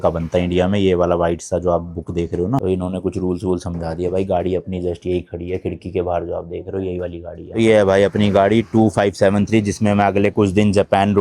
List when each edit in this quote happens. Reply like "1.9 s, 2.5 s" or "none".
2.6 s